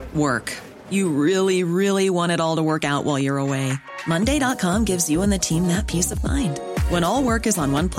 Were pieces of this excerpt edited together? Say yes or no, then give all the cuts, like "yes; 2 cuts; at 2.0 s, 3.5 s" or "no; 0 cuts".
no; 0 cuts